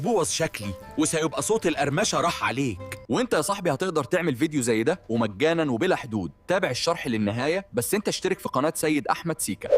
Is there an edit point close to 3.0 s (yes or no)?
yes